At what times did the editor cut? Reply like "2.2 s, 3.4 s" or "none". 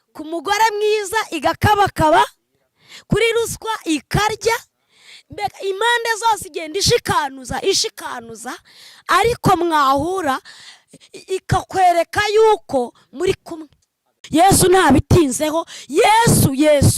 14.2 s